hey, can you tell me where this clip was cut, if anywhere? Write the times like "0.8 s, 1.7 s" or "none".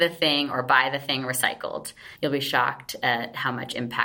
2.0 s